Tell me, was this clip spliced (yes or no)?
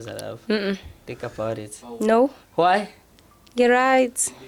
no